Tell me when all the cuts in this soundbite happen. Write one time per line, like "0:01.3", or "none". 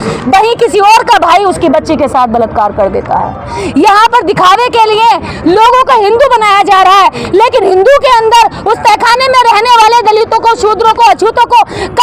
none